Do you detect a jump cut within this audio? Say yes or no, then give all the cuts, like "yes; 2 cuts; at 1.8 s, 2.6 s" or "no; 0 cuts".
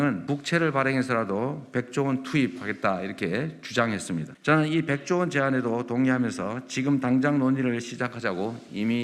no; 0 cuts